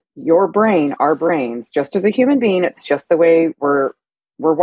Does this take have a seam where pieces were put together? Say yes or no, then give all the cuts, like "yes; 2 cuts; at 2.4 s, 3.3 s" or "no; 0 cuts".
no; 0 cuts